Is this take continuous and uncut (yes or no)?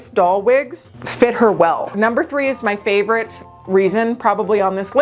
no